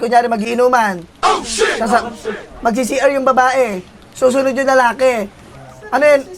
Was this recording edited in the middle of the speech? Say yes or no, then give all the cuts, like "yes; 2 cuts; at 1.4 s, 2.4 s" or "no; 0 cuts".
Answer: no; 0 cuts